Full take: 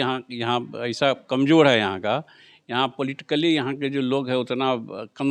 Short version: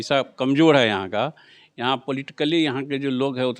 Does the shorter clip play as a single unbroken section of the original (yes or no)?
yes